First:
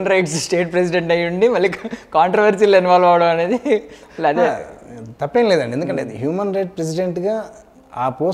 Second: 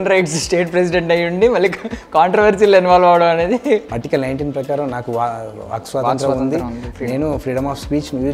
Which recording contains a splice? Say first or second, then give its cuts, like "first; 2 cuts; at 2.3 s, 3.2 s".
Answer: second; 1 cut; at 3.9 s